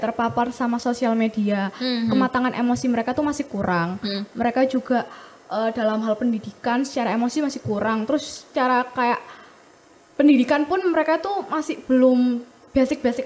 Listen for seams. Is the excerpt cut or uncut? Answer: uncut